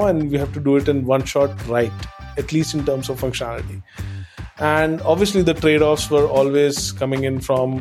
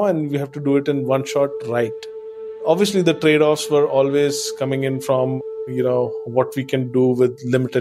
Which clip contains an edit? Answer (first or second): second